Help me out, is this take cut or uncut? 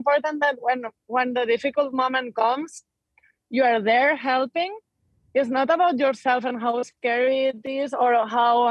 uncut